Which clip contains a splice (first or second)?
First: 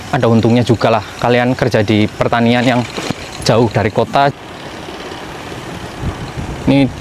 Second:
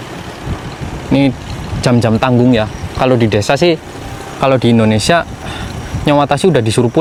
first